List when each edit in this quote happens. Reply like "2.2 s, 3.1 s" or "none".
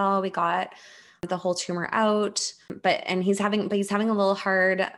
1.2 s, 2.7 s